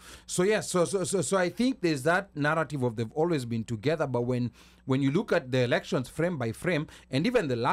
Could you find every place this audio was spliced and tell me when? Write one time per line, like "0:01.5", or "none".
none